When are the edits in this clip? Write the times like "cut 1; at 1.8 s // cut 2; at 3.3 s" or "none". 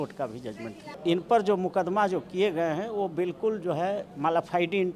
cut 1; at 0.9 s // cut 2; at 4.1 s

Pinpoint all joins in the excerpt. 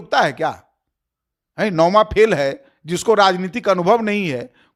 none

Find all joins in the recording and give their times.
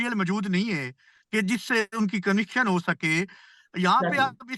none

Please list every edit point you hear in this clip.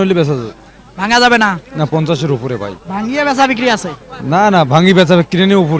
none

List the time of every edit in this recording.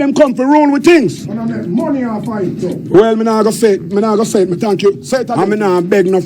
cut 1; at 5.2 s

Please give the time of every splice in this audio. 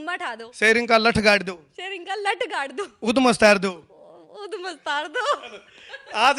none

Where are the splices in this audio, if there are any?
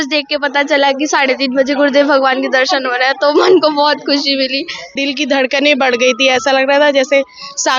cut 1; at 4.9 s

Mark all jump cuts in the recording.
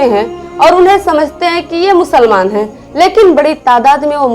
none

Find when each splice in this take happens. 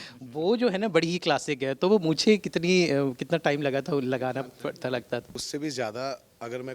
cut 1; at 5.4 s

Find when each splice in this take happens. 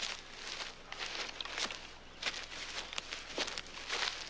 none

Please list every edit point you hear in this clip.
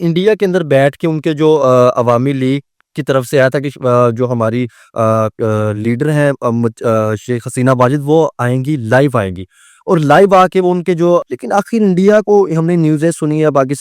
cut 1; at 11.3 s

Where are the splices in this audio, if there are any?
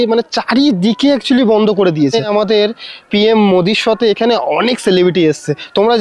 cut 1; at 2.7 s

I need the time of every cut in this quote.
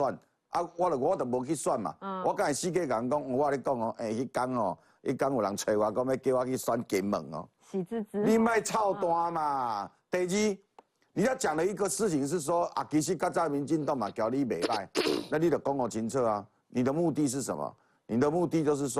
none

